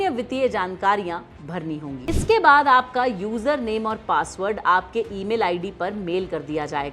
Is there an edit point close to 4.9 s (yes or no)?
no